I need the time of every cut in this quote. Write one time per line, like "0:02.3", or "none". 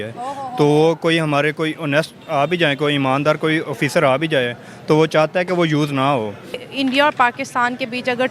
0:06.6